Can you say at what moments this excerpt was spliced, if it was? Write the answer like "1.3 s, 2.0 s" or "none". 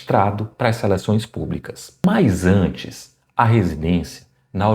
2.0 s